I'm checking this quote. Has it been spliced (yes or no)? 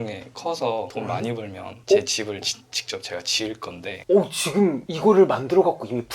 no